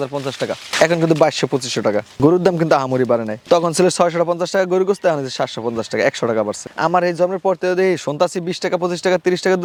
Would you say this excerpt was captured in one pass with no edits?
yes; 0 cuts

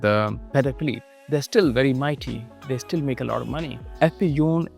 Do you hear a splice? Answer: yes; 2 cuts; at 1.1 s, 3.8 s

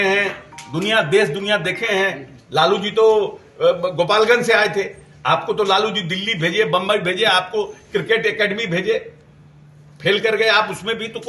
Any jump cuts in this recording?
no; 0 cuts

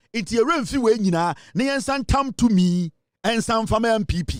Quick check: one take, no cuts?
yes; 0 cuts

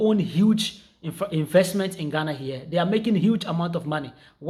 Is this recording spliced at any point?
no; 0 cuts

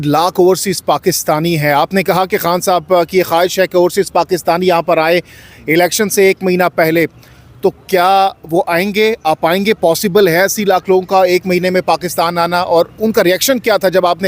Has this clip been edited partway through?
no; 0 cuts

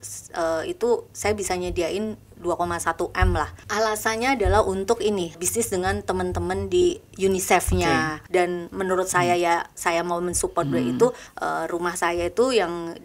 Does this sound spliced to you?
yes; 4 cuts; at 3.6 s, 5.4 s, 8.2 s, 11.3 s

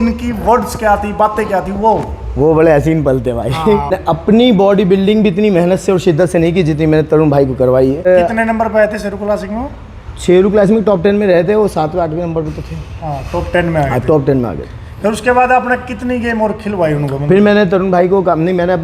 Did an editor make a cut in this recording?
yes; 2 cuts; at 3.9 s, 8.1 s

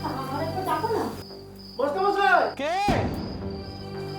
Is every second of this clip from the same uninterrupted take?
no; 1 cut; at 2.9 s

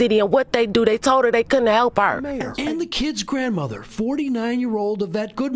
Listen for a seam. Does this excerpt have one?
yes; 1 cut; at 2.3 s

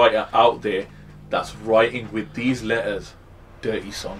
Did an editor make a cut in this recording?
no; 0 cuts

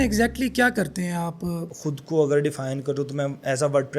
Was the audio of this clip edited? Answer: yes; 1 cut; at 1.7 s

